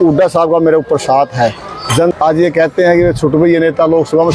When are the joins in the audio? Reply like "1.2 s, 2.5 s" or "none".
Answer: 2.2 s